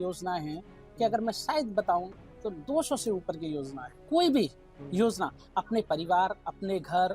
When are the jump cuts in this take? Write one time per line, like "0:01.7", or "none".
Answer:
0:04.0

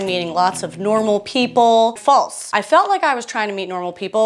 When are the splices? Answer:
0:02.0

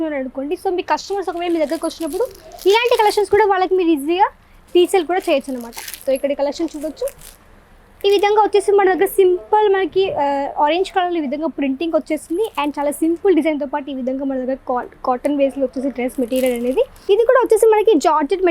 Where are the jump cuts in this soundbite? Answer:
0:17.0

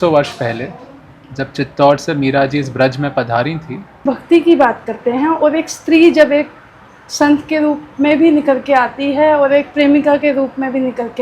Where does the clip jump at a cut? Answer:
0:04.0

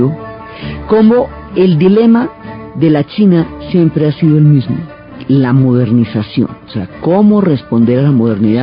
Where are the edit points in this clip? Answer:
none

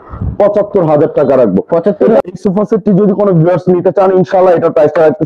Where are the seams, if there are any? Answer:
0:02.2

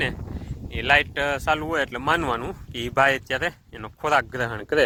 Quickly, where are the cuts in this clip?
none

